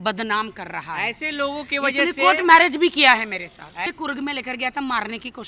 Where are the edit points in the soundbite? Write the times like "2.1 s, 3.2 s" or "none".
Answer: 3.8 s

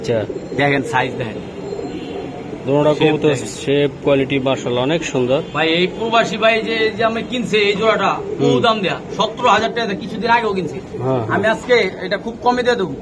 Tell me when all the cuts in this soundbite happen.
none

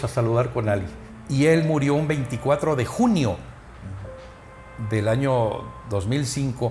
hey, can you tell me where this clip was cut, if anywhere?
1.0 s

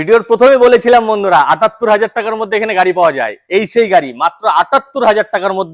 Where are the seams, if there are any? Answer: none

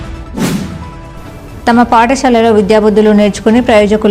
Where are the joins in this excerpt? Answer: 0.9 s

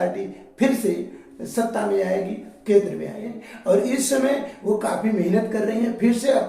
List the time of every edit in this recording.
3.5 s

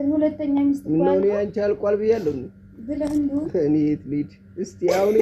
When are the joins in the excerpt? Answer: 3.5 s

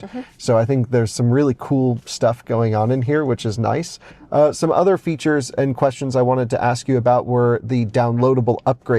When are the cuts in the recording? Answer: none

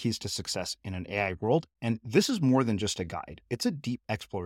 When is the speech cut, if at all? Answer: none

